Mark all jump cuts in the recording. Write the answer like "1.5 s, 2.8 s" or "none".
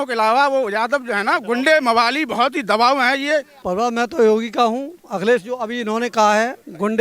3.5 s

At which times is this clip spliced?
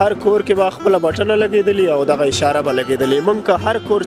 none

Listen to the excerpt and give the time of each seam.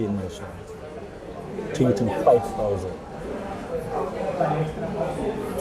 none

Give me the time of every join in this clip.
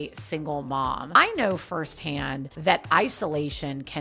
none

